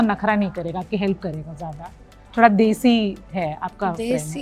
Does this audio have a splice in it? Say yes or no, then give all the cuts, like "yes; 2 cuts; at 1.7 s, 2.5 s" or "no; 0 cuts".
no; 0 cuts